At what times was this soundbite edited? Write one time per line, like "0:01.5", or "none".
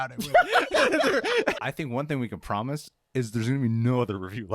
0:01.7